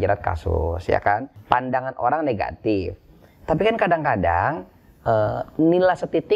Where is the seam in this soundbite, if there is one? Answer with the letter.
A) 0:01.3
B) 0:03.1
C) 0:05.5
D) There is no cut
A